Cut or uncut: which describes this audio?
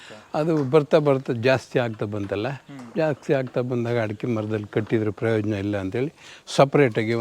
uncut